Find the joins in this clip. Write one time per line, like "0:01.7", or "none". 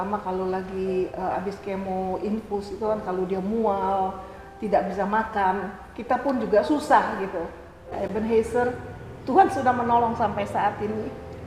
0:08.0